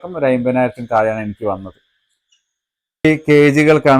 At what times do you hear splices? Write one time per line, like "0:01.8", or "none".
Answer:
0:03.0